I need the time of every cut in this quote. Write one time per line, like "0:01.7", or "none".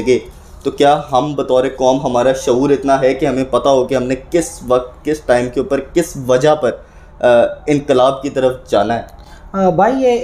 none